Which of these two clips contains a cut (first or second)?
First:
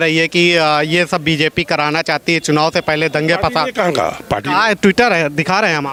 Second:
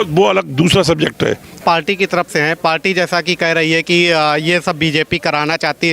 second